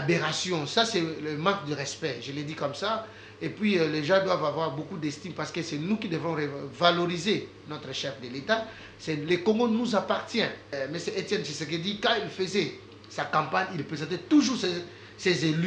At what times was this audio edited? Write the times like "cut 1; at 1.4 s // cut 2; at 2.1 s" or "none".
cut 1; at 10.6 s

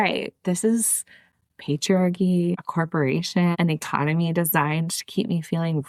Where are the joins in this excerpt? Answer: none

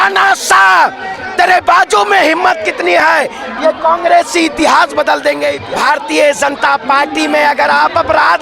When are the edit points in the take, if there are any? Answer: cut 1; at 5.6 s

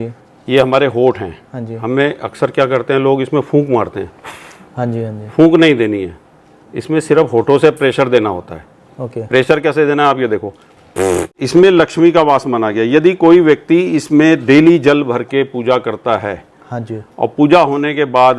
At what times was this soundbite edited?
cut 1; at 11.4 s

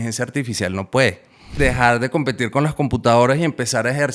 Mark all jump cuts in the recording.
cut 1; at 1.5 s

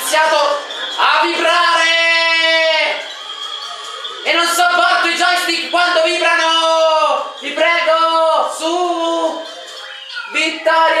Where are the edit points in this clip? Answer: none

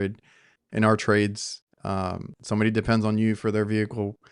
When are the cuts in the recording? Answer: none

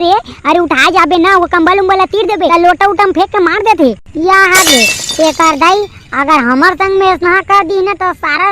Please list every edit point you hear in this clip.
cut 1; at 2.5 s

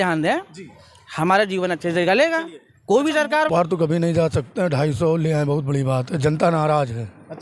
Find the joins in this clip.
cut 1; at 3.5 s

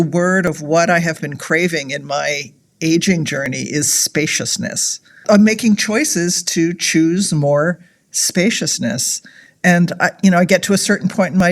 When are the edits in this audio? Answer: cut 1; at 5.2 s

